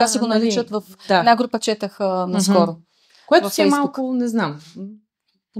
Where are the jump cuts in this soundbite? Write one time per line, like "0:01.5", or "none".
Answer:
none